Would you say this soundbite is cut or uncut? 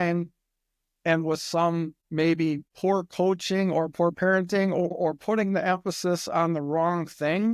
cut